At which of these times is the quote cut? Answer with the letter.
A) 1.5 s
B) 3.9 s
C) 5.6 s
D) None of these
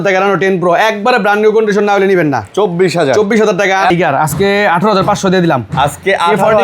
B